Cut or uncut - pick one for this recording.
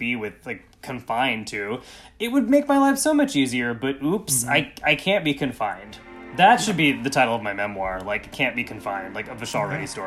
uncut